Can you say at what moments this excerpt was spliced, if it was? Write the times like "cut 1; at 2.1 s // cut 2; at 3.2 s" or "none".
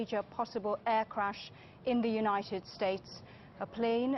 cut 1; at 1.5 s